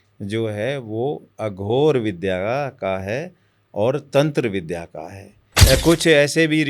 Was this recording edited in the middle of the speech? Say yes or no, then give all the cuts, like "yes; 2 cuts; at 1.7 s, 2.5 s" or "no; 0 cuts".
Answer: yes; 1 cut; at 5.5 s